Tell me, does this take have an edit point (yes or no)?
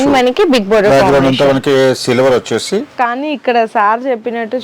yes